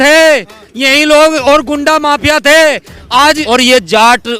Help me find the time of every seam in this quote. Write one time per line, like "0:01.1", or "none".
0:03.4